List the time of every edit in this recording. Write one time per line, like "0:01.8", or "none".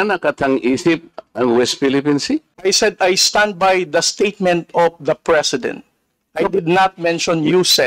0:02.5